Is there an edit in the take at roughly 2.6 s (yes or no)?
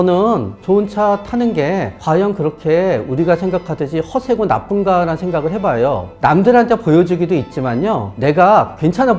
no